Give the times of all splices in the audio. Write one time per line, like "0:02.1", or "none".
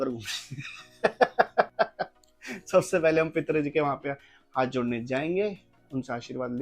none

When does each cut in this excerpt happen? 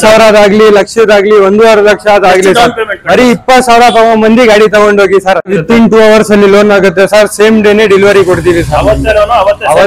0:05.6

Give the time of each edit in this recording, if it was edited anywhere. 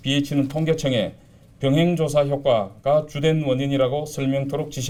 none

